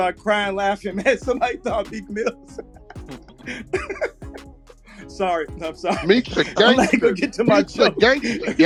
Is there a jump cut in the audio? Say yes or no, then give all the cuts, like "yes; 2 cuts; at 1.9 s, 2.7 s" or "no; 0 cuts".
no; 0 cuts